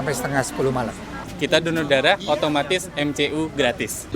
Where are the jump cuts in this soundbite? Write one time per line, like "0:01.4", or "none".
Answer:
0:01.4